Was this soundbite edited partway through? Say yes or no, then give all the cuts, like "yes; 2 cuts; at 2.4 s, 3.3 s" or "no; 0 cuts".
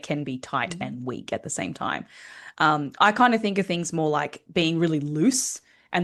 no; 0 cuts